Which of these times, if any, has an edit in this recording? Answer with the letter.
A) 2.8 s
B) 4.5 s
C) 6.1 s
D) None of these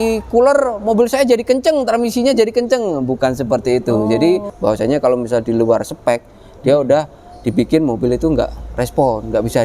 B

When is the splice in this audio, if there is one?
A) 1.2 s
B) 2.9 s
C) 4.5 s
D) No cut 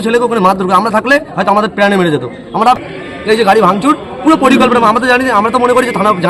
B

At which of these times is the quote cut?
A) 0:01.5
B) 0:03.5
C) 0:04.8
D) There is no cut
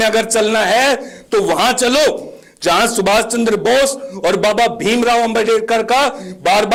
D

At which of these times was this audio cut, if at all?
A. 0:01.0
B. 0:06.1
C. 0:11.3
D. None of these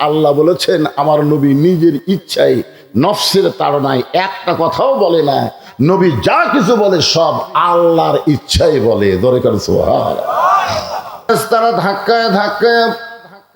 C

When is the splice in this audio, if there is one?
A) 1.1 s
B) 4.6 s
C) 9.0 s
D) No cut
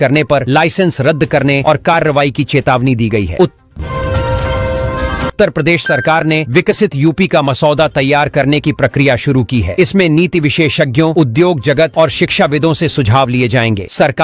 D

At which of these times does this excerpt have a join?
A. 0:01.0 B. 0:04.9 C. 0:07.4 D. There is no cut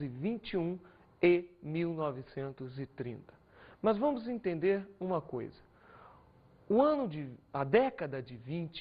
A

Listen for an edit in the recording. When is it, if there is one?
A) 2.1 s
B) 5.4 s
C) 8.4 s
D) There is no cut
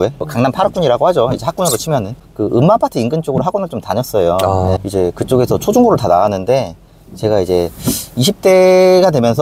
A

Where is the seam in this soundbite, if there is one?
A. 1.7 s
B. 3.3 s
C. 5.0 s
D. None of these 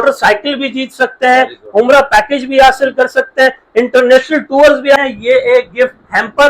C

